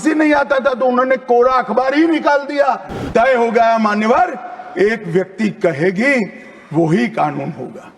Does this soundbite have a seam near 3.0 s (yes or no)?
yes